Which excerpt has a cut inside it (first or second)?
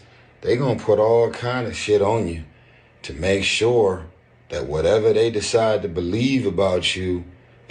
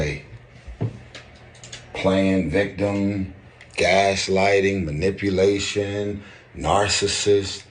second